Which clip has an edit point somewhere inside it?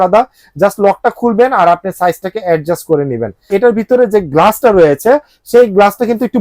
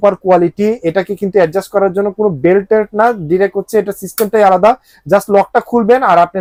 first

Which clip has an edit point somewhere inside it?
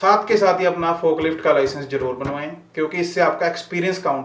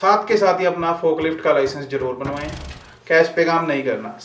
second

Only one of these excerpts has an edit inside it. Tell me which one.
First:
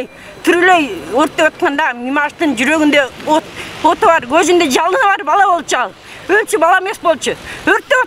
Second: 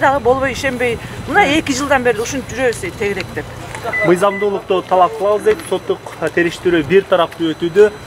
second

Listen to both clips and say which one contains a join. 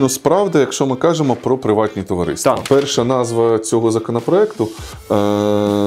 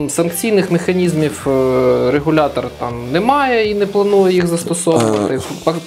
first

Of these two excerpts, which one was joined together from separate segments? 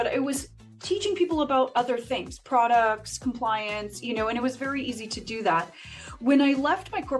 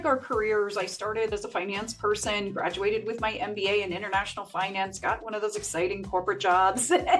second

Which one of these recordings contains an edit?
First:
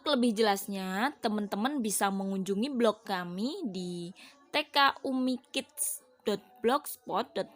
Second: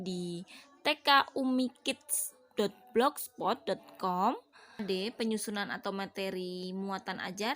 second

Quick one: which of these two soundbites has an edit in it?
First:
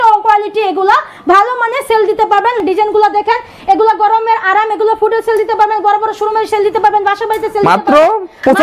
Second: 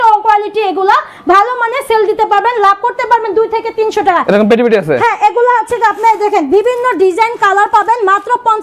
first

